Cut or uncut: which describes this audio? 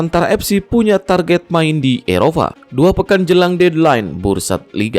cut